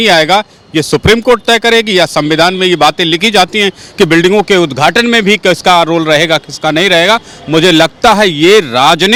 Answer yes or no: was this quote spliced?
no